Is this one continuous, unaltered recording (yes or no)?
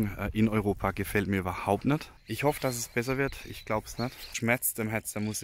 no